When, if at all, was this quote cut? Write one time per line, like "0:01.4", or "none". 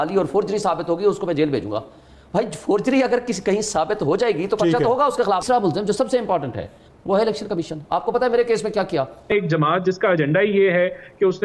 0:05.4
0:09.3